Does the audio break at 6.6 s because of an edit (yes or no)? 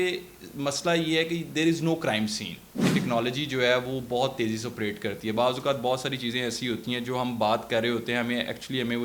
no